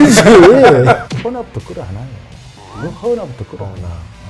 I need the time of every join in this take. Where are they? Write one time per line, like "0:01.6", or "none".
0:01.0